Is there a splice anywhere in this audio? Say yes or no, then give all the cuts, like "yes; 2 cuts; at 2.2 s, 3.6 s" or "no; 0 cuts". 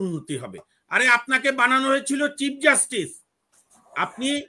no; 0 cuts